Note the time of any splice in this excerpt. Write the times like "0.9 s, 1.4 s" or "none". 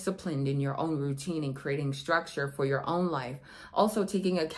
none